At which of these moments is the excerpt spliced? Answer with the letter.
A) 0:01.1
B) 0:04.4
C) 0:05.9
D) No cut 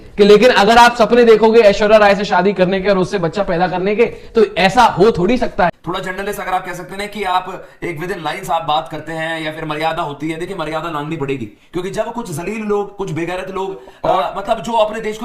C